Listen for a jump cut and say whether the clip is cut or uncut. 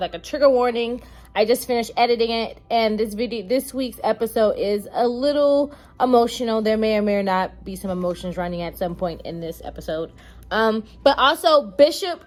uncut